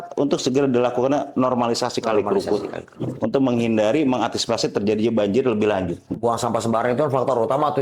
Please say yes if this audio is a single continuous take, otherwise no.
no